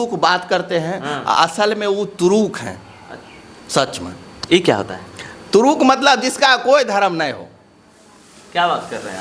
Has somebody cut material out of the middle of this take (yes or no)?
no